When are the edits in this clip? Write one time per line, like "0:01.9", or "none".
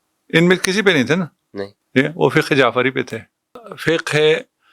0:03.6